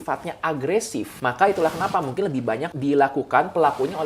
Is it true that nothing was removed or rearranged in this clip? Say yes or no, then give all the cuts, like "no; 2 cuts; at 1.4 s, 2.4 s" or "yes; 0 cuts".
no; 2 cuts; at 1.1 s, 2.7 s